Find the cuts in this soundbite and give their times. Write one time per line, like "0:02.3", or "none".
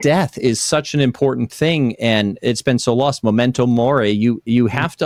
none